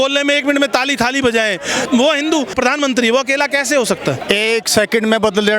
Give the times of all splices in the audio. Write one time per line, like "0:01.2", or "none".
0:01.8
0:02.5
0:04.2